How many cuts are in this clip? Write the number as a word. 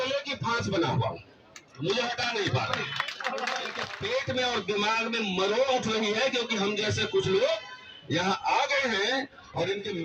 one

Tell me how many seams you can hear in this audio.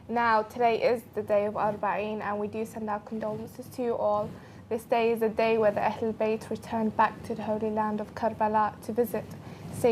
one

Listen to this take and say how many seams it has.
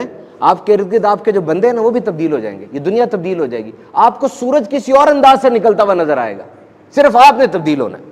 zero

